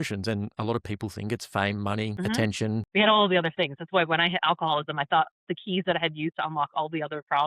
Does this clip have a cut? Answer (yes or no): yes